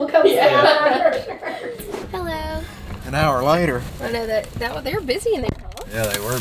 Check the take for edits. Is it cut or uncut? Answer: uncut